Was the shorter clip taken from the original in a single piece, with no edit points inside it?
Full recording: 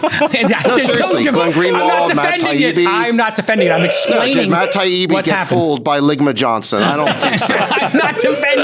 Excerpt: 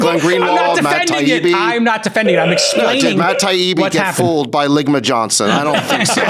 yes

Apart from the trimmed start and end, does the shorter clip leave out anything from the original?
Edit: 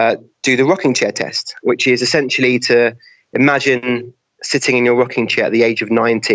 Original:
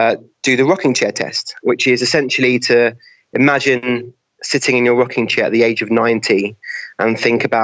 no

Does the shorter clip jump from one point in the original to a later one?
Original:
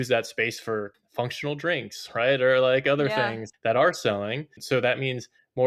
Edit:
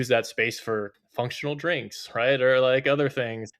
no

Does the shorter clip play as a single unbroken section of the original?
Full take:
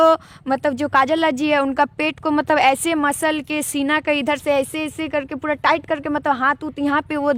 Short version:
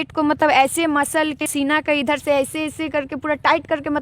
no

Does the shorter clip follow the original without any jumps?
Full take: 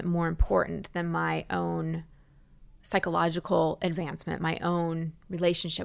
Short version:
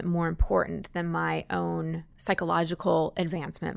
no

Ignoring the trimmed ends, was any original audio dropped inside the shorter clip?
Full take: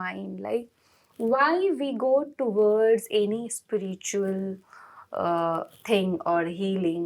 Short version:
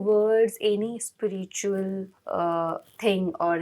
yes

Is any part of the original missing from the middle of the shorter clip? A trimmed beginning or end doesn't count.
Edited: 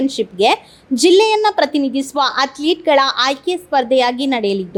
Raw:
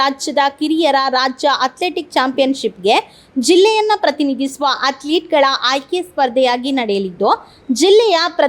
no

